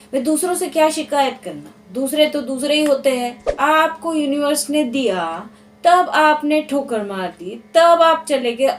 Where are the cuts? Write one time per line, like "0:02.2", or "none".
0:03.4